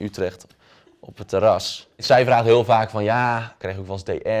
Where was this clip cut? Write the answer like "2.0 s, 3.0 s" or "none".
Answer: 2.0 s, 3.5 s